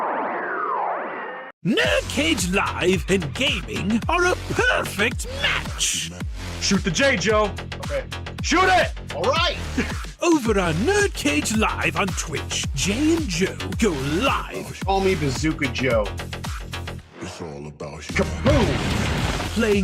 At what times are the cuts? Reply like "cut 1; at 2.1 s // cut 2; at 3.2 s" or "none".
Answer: cut 1; at 1.4 s